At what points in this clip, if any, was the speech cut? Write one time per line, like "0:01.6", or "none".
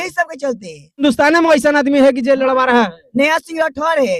0:01.0